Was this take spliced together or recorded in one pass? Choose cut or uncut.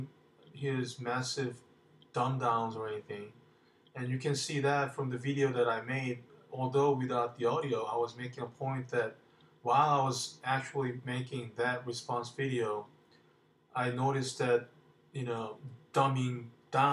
cut